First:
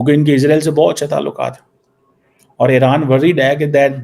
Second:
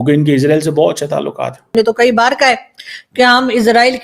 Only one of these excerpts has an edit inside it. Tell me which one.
second; 1 cut; at 1.7 s

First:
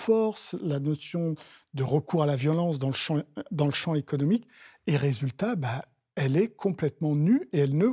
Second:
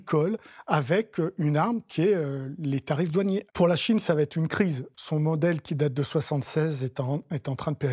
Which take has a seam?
second; 2 cuts; at 3.5 s, 4.9 s

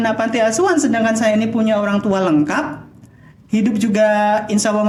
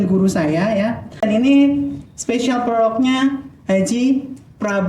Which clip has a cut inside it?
second; 1 cut; at 1.2 s

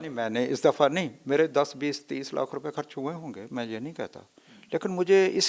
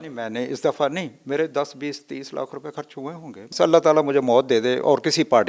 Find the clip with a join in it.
second; 1 cut; at 3.5 s

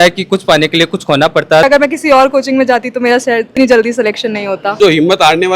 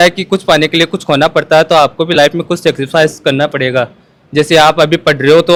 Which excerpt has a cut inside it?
first; 2 cuts; at 1.6 s, 4.7 s

